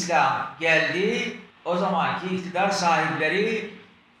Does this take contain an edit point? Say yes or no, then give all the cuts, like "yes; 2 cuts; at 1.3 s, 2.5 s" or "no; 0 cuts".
no; 0 cuts